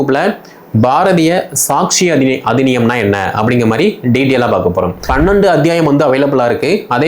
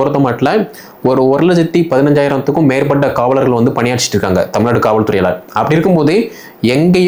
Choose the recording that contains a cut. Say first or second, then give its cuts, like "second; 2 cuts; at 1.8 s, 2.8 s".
first; 1 cut; at 5.1 s